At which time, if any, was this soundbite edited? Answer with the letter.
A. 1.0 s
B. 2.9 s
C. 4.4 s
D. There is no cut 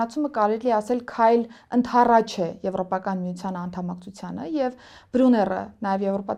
D